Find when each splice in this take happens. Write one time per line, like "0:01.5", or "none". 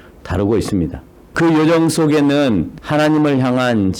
0:01.3
0:02.8